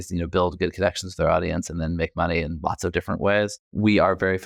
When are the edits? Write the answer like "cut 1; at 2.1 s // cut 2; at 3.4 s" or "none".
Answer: none